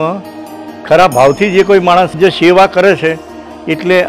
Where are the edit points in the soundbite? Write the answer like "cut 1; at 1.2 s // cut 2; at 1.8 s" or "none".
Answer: cut 1; at 2.2 s